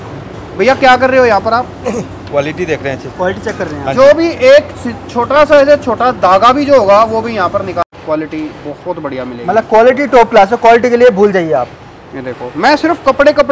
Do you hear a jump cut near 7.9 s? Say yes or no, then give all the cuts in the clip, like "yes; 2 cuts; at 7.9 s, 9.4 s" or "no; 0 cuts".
yes; 1 cut; at 7.9 s